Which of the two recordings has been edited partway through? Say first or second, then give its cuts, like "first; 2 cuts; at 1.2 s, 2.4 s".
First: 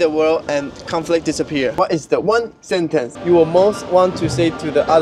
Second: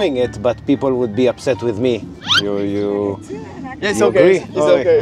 second; 1 cut; at 2.1 s